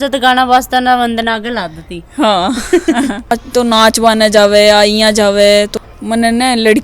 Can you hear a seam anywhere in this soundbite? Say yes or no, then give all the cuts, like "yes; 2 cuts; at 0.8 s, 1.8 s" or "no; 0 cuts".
yes; 2 cuts; at 3.4 s, 5.7 s